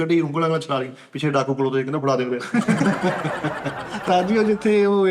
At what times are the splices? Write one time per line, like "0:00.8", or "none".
0:04.0

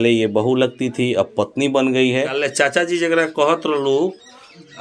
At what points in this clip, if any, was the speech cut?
0:02.4

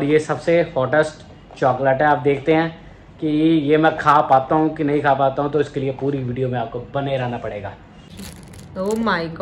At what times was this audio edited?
0:08.3

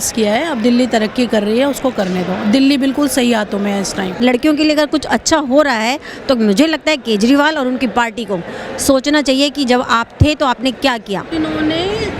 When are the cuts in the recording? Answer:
0:04.2
0:11.3

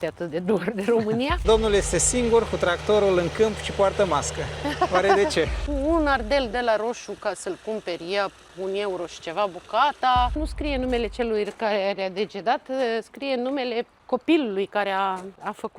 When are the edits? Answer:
0:01.4
0:05.6
0:10.4

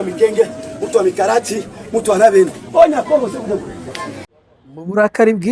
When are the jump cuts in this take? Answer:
0:04.4

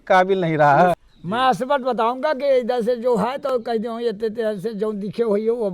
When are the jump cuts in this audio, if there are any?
0:01.1

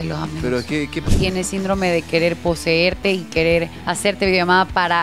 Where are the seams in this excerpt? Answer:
0:01.0
0:03.8

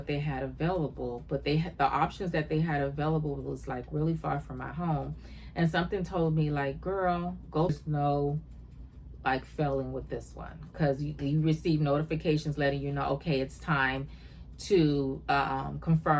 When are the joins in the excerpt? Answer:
0:07.7

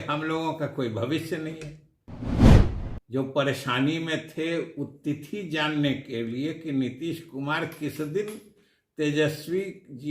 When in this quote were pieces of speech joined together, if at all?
0:02.2
0:02.7

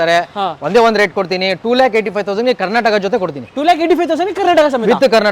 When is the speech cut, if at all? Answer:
none

